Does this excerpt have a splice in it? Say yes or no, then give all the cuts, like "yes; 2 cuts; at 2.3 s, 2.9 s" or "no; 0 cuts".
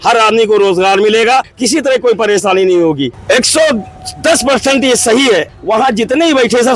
yes; 3 cuts; at 1.6 s, 3.2 s, 5.5 s